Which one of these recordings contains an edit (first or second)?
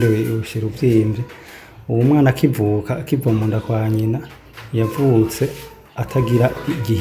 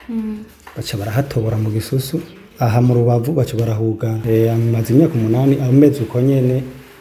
second